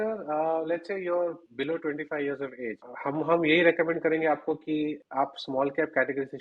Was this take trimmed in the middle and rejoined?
yes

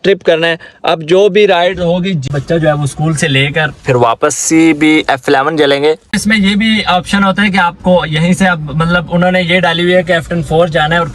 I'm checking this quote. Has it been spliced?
yes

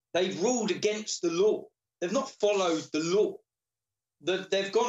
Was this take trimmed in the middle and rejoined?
no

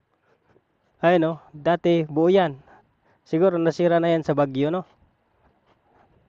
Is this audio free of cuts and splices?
yes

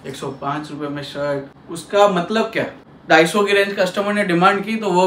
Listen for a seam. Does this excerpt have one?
yes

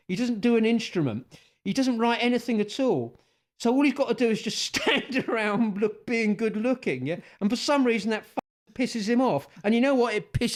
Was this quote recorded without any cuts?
yes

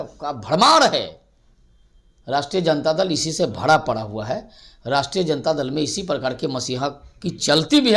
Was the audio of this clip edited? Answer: no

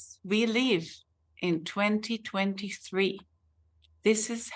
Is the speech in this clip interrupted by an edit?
no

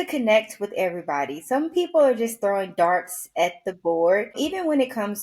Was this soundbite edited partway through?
yes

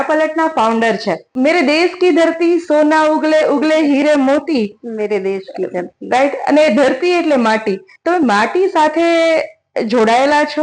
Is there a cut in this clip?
yes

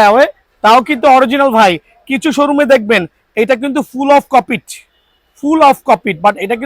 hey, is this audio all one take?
yes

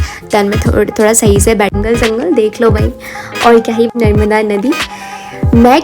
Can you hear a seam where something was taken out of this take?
yes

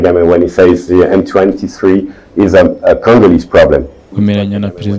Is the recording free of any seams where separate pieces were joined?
no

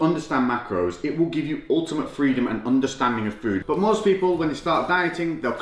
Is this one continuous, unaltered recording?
no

